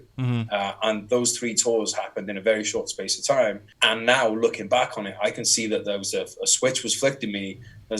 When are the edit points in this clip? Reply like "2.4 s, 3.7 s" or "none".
3.7 s